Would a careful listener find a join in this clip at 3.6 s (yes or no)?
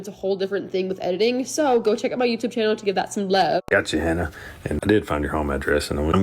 yes